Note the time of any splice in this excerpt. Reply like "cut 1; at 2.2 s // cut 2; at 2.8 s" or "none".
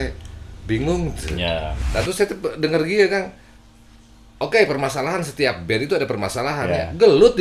cut 1; at 1.8 s